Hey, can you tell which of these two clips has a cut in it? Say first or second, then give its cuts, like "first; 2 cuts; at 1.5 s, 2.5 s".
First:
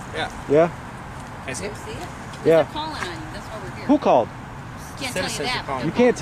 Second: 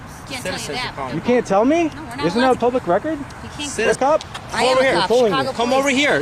second; 1 cut; at 3.9 s